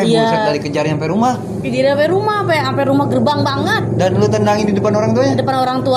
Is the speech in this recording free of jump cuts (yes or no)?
yes